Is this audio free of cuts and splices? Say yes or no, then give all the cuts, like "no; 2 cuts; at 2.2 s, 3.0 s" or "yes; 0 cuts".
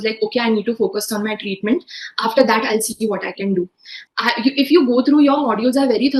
no; 1 cut; at 4.0 s